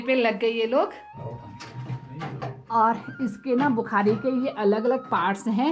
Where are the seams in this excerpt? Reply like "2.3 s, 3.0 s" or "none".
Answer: none